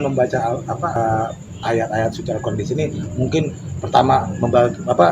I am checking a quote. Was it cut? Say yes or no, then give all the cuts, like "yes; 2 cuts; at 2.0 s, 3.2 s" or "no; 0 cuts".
yes; 1 cut; at 1.0 s